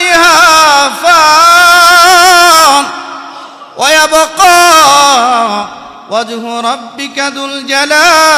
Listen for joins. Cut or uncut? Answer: uncut